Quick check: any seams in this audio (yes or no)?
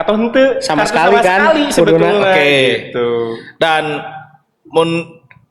no